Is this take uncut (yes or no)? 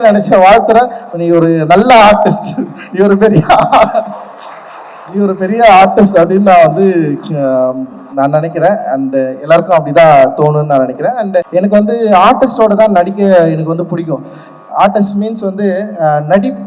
no